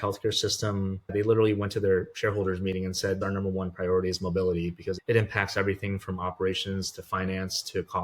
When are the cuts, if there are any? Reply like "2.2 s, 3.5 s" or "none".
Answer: 1.1 s, 3.2 s, 5.0 s